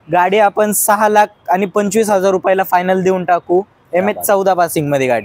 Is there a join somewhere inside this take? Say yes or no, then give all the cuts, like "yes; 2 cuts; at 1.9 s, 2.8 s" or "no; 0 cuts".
no; 0 cuts